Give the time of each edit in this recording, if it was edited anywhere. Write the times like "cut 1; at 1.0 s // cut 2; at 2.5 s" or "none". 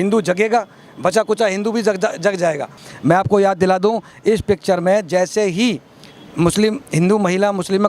cut 1; at 2.8 s